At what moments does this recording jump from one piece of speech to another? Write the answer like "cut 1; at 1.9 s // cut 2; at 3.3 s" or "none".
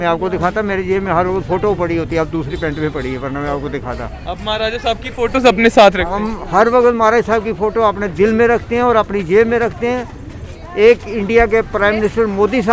none

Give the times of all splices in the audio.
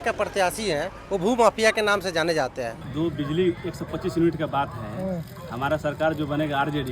cut 1; at 2.8 s

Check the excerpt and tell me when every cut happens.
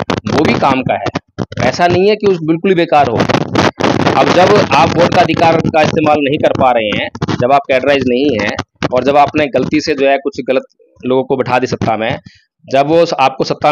none

